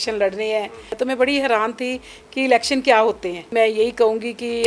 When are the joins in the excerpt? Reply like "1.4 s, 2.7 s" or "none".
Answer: 0.9 s, 3.5 s